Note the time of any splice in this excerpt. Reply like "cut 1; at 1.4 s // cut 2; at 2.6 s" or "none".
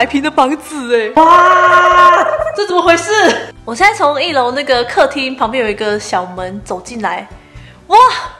cut 1; at 1.2 s